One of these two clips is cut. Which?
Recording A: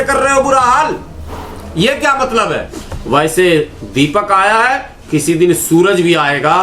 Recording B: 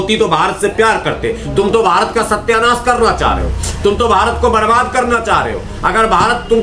A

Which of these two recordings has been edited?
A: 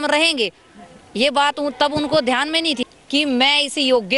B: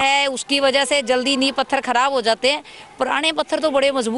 A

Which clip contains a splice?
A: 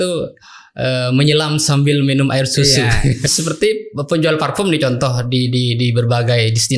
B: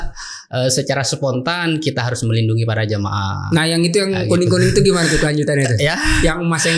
A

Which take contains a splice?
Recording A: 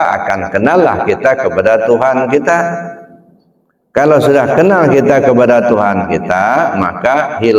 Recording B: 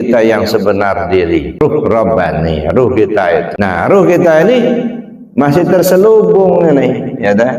B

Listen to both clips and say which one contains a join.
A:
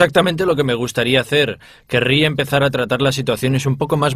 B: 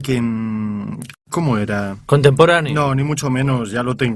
B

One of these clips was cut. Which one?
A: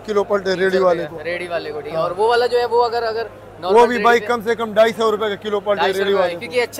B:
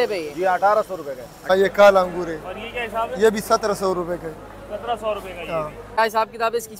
B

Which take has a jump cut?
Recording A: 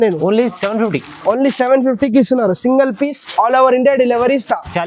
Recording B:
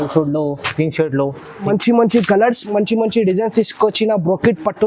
B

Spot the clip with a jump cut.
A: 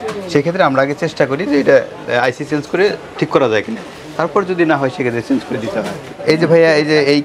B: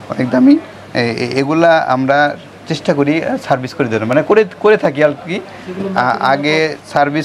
A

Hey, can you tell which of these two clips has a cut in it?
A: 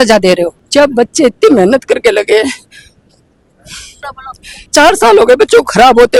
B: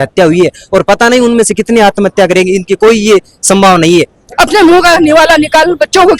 B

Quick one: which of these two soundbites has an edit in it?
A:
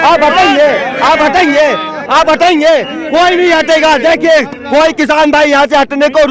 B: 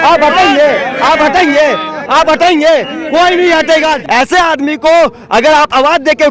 B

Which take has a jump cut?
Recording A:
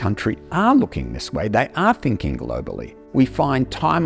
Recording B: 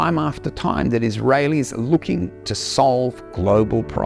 A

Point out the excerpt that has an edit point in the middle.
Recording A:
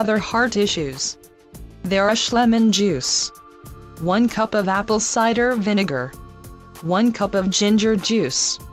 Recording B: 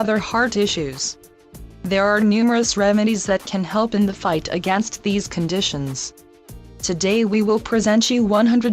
B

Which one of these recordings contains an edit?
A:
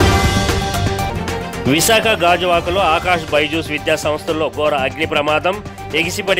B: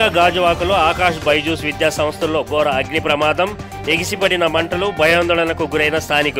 A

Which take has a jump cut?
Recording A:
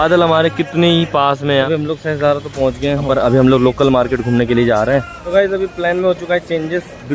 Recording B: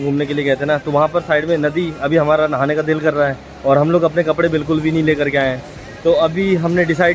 A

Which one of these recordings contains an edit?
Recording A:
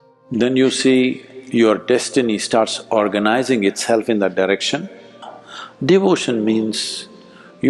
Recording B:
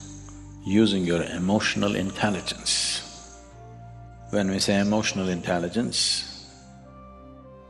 A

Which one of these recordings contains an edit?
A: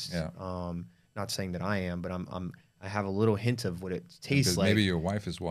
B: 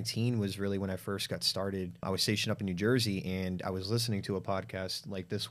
B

